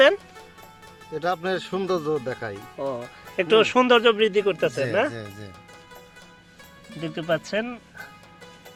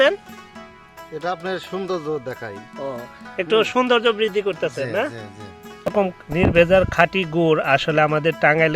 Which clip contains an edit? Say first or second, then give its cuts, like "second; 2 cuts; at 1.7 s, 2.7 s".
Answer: second; 1 cut; at 5.9 s